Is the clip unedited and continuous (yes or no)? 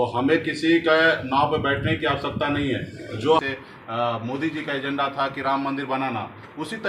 no